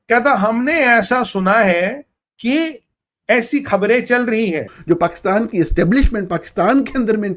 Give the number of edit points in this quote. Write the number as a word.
one